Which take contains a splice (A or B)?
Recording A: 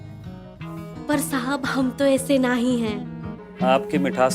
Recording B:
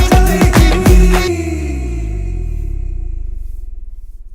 B